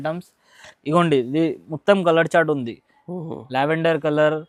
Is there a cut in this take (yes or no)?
no